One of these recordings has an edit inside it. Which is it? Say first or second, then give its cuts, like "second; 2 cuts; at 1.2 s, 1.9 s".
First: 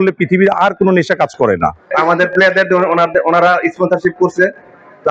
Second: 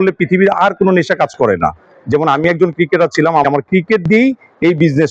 first; 1 cut; at 1.8 s